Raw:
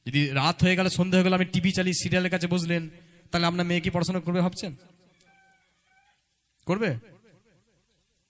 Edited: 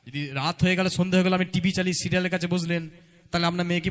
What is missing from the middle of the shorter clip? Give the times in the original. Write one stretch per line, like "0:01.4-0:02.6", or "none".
none